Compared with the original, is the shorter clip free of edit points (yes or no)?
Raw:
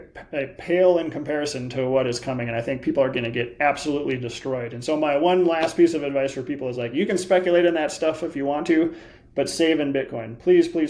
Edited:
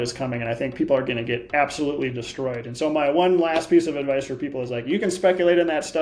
yes